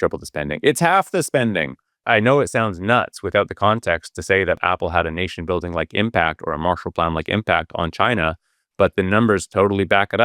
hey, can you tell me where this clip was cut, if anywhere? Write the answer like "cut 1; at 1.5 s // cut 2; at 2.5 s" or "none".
cut 1; at 2.0 s // cut 2; at 4.6 s